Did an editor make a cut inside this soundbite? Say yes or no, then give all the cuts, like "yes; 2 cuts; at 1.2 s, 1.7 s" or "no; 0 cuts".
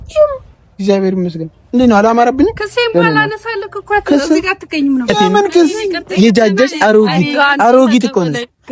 yes; 1 cut; at 5.8 s